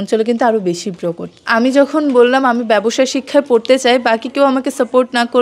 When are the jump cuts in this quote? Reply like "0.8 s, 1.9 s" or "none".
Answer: 1.4 s